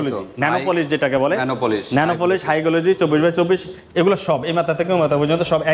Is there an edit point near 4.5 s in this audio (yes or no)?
no